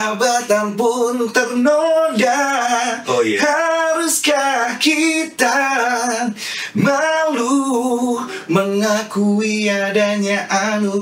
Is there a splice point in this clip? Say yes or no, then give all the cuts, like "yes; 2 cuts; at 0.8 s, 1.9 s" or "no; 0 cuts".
no; 0 cuts